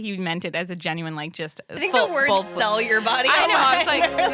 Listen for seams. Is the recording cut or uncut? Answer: cut